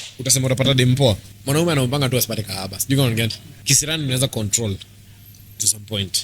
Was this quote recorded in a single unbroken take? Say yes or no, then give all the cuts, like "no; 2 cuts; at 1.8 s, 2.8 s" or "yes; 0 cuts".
no; 2 cuts; at 1.3 s, 3.5 s